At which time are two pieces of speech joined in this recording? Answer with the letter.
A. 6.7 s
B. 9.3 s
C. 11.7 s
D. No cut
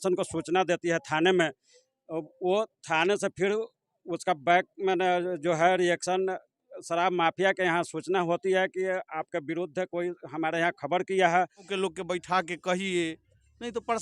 C